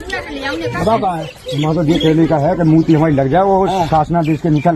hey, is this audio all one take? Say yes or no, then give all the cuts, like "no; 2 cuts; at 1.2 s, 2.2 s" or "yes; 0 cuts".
yes; 0 cuts